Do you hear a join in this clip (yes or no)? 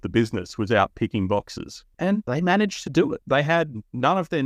yes